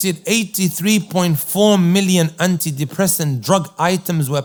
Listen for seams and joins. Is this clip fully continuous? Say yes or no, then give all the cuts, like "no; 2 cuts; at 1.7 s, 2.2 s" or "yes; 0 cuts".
yes; 0 cuts